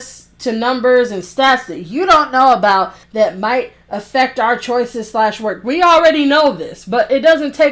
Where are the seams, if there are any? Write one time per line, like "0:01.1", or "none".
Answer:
0:03.0